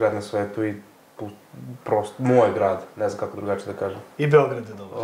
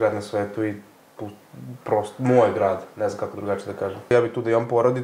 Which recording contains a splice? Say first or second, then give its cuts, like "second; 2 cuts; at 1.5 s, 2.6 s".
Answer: second; 1 cut; at 4.1 s